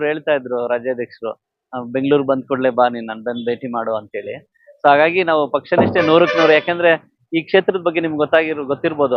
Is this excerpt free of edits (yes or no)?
yes